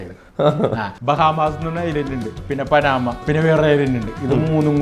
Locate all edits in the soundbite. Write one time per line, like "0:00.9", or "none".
0:00.9
0:02.4
0:03.2